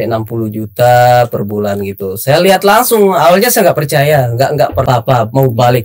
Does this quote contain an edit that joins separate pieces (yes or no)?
yes